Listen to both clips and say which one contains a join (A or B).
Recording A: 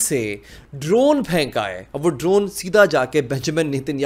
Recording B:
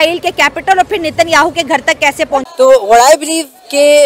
B